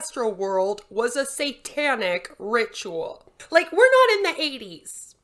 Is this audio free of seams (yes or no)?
no